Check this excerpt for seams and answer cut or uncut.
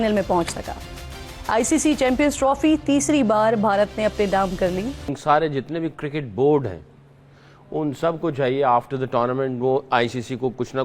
cut